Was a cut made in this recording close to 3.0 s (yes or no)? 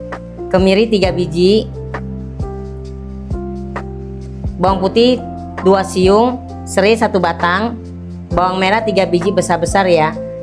no